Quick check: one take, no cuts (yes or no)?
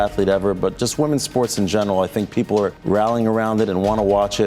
no